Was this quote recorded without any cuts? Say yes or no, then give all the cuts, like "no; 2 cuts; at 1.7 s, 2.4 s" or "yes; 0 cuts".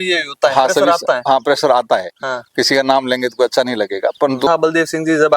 no; 1 cut; at 4.5 s